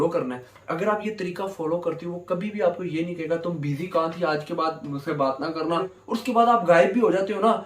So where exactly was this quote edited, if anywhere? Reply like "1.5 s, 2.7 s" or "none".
5.9 s